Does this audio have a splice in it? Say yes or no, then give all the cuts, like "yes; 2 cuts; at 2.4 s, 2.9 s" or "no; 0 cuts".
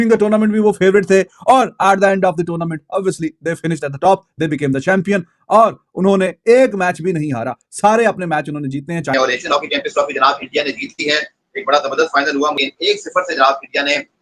yes; 1 cut; at 9.1 s